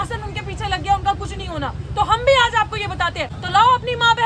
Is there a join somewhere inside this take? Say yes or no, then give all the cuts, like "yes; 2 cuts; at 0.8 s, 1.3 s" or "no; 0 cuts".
yes; 1 cut; at 3.3 s